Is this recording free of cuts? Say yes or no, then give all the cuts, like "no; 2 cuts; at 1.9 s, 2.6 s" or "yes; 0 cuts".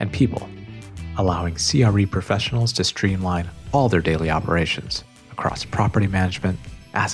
yes; 0 cuts